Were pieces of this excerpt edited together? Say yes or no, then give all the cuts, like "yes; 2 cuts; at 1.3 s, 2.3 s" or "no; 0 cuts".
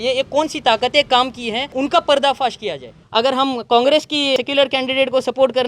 yes; 3 cuts; at 1.7 s, 2.9 s, 4.4 s